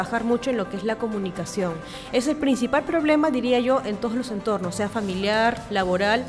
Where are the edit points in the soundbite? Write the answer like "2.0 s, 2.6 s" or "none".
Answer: none